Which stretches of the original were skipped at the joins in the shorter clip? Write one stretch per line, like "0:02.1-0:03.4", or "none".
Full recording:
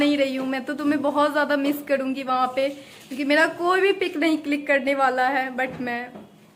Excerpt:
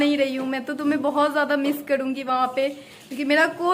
none